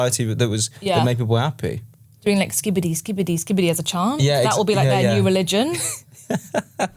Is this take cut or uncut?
cut